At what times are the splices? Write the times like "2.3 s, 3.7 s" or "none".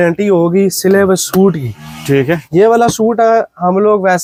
none